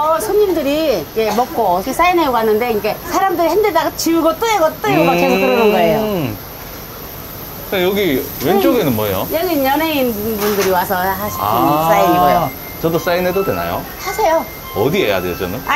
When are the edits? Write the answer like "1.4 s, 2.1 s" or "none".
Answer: none